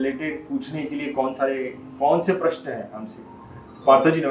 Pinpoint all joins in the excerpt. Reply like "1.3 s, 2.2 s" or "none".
none